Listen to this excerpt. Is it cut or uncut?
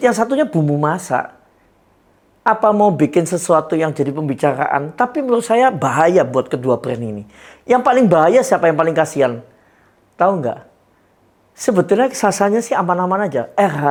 uncut